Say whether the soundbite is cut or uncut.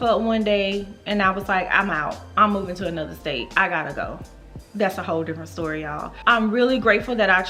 uncut